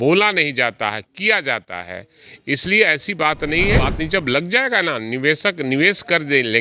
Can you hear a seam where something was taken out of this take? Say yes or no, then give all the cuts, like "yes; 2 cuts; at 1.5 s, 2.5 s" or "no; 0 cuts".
yes; 1 cut; at 3.9 s